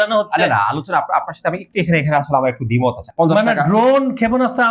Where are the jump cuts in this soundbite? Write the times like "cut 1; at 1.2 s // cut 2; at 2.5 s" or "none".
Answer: cut 1; at 3.0 s